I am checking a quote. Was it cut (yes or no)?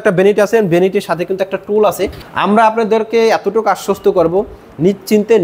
yes